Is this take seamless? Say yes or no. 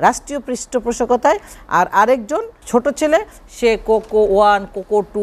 no